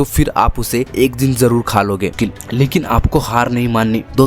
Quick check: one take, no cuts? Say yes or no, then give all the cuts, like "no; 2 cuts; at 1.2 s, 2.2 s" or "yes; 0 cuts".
no; 1 cut; at 2.1 s